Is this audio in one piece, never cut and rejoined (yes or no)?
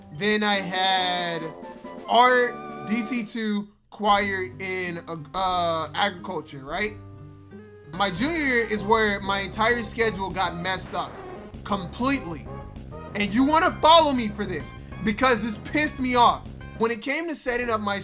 no